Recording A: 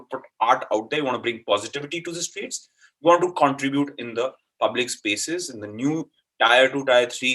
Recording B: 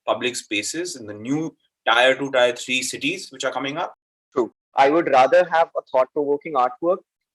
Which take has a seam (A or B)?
B